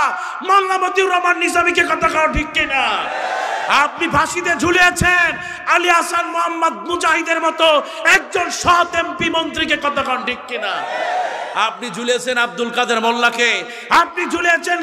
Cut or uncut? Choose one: uncut